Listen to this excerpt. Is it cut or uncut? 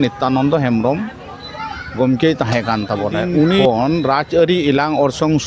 cut